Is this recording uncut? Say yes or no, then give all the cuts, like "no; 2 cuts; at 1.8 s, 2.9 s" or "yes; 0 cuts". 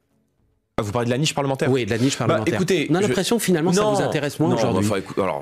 yes; 0 cuts